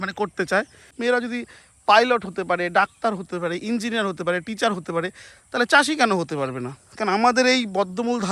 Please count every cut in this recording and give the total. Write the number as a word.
one